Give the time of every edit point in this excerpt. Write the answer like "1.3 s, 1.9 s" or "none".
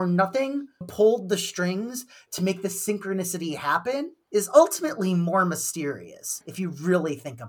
6.4 s